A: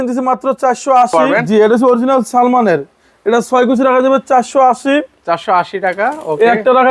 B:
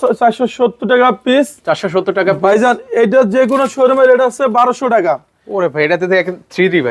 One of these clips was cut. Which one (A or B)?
A